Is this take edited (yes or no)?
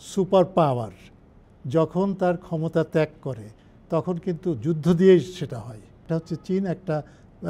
yes